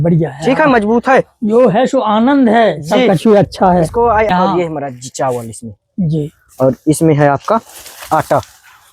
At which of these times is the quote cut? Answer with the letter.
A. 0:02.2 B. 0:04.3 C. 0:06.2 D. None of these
B